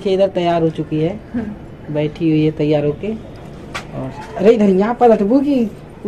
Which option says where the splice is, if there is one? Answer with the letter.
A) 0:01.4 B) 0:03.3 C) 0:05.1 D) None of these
D